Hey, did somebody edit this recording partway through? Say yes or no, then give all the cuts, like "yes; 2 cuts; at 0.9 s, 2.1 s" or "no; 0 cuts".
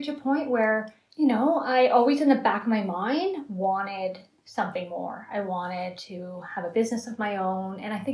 yes; 1 cut; at 1.0 s